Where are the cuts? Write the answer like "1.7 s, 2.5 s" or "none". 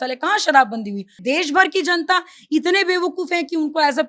1.2 s